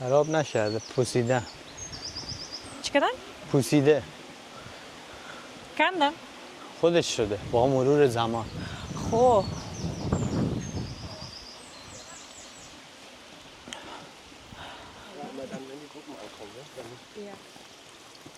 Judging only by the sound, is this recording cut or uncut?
uncut